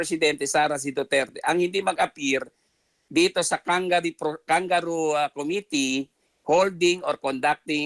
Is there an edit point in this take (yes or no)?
no